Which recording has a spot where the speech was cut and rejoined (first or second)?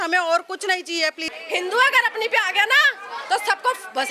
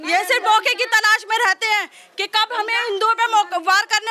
first